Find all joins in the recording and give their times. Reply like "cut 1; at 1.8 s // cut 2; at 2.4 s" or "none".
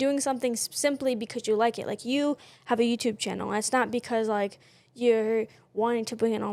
none